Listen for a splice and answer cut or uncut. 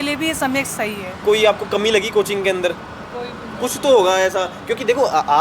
cut